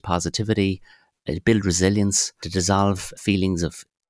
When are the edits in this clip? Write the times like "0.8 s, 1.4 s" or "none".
none